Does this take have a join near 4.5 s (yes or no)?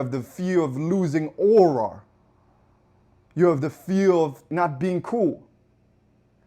yes